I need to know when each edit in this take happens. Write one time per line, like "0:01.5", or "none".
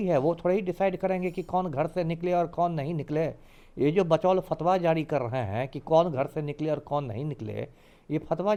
none